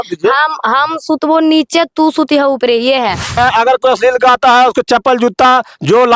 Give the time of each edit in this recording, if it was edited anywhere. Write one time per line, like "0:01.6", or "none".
0:03.3